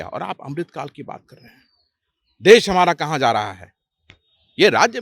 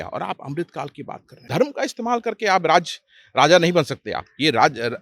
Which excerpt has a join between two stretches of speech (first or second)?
second